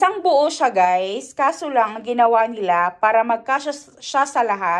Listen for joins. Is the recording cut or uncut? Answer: uncut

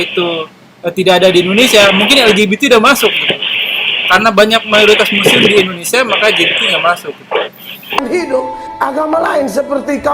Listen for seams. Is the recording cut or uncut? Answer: cut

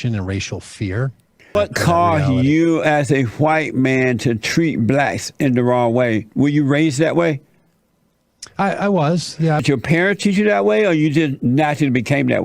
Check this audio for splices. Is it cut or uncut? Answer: cut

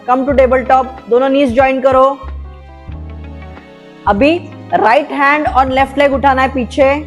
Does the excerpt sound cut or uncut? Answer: cut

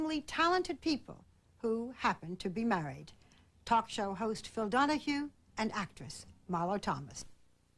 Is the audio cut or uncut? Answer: cut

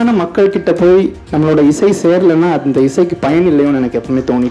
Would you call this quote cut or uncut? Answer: uncut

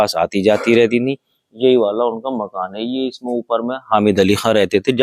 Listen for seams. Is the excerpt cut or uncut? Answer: uncut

